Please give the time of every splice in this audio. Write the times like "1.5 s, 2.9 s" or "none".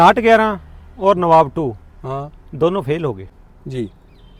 none